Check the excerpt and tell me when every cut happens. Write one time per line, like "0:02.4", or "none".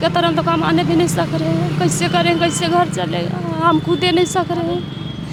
none

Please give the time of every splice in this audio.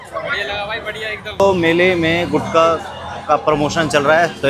0:01.4

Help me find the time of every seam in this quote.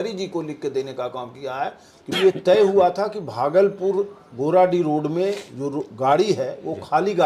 0:02.2

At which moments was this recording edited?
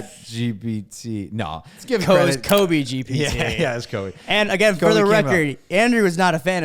0:01.8

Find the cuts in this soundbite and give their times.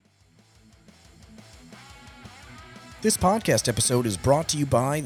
0:03.0

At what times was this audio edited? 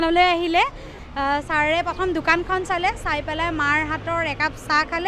0:01.0

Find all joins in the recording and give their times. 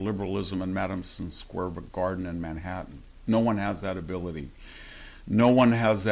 none

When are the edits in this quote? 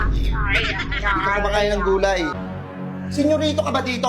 0:02.4

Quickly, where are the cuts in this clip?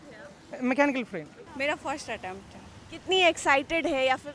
0:01.4

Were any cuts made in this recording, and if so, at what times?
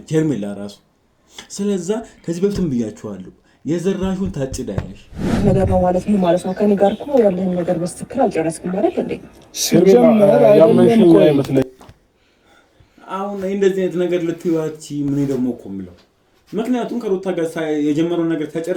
0:05.3

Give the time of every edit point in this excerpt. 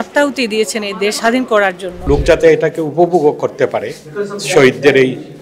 0:01.2
0:02.0

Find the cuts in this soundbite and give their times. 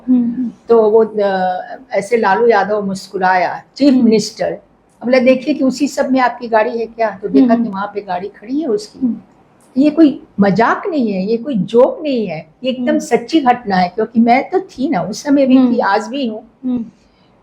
none

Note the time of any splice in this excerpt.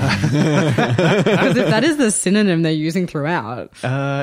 none

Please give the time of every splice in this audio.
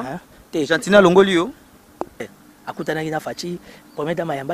0:02.2

